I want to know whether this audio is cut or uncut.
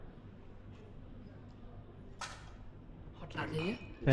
uncut